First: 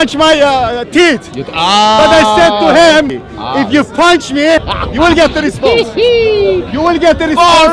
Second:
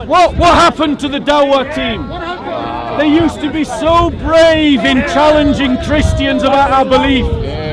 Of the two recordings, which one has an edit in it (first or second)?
first